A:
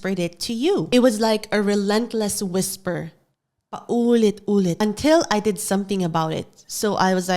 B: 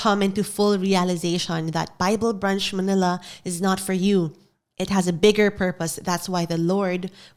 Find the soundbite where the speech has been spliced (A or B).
A